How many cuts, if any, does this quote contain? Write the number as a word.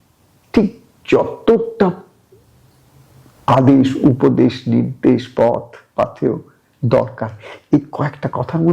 zero